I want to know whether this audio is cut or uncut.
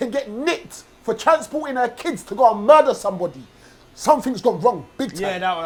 uncut